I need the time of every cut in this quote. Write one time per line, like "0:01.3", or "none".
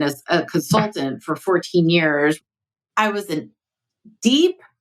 0:02.4